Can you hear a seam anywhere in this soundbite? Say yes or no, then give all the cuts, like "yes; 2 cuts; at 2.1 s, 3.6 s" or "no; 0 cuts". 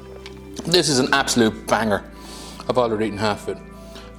no; 0 cuts